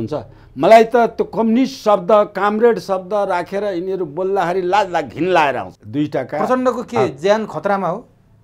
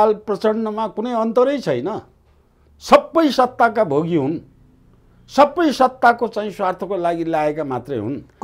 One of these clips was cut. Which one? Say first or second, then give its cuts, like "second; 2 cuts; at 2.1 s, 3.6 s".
first; 1 cut; at 5.8 s